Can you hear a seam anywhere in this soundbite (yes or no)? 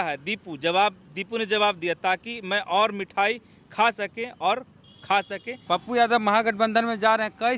yes